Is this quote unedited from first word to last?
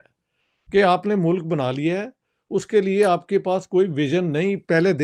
yes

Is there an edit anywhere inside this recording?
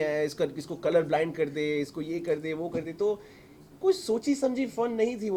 no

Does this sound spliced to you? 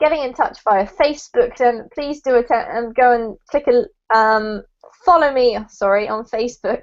yes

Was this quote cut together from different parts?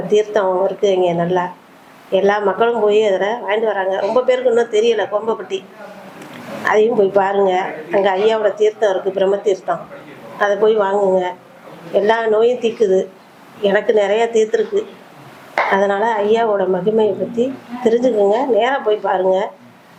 no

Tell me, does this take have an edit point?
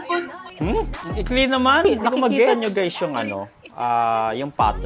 yes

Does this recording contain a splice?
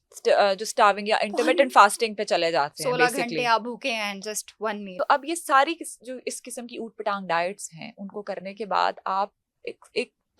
yes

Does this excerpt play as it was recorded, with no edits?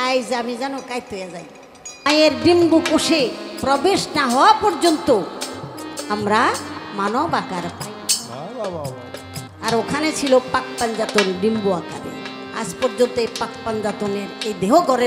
no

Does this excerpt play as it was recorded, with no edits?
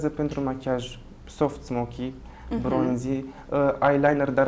yes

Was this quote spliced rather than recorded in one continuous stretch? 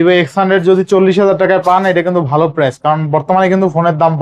no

